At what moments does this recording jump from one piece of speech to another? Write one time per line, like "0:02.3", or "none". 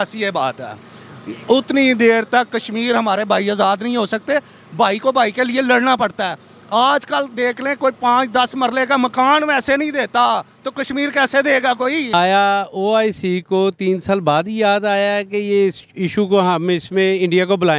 0:12.1